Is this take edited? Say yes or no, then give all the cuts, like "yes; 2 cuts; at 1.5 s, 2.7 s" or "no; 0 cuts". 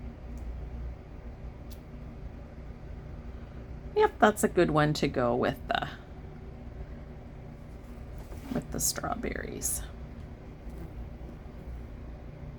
no; 0 cuts